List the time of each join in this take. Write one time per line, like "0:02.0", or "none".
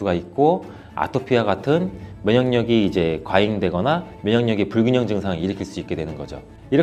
none